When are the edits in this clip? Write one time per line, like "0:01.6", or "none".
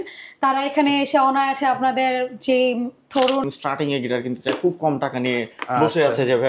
0:03.4

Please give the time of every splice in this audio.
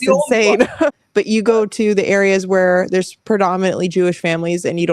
0:01.0

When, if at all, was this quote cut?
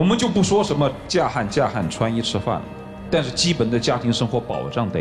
none

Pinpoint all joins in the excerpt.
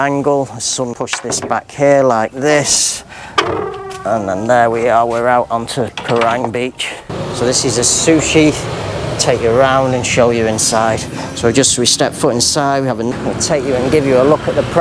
0:00.9
0:07.2
0:13.1

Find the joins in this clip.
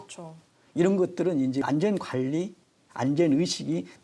0:01.6

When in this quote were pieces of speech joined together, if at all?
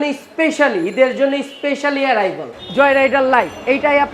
0:02.5

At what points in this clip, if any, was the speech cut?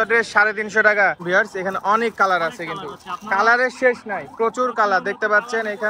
0:01.2

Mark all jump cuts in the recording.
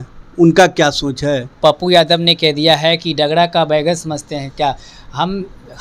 0:01.6

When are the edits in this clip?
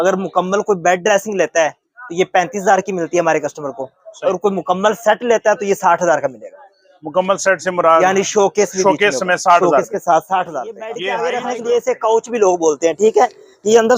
0:10.9

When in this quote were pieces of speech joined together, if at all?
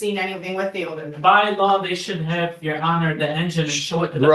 none

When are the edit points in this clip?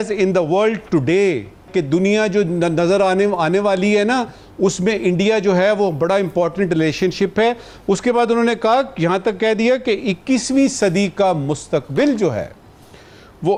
none

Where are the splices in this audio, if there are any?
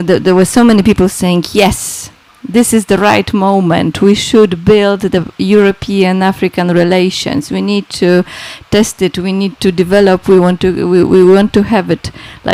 none

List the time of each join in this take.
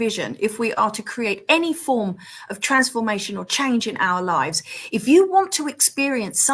none

